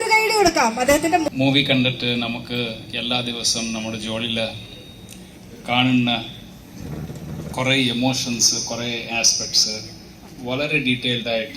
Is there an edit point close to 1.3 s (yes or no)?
yes